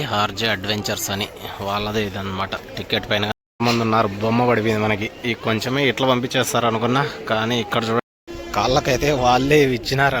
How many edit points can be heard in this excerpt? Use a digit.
2